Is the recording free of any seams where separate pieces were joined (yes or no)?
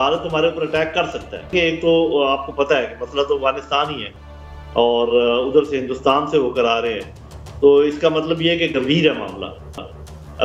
no